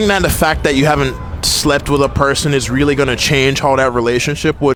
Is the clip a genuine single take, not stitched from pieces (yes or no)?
yes